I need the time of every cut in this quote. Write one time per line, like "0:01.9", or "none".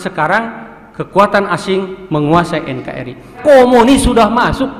0:03.4

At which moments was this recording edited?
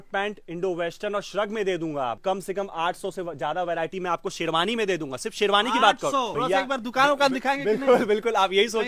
0:02.2
0:06.3

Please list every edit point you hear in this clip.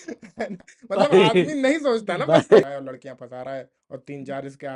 0:02.6

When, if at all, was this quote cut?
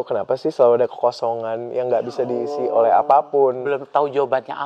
none

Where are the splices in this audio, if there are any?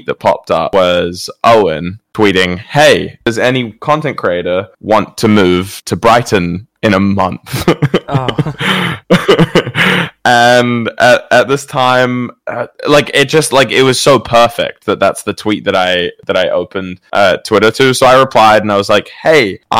none

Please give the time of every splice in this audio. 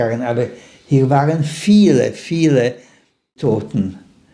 0:03.4

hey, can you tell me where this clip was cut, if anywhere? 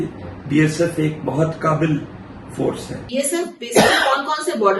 0:03.1

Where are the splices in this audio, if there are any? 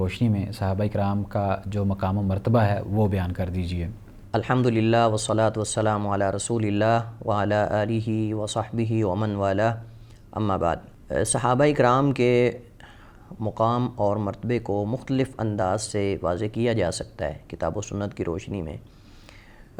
none

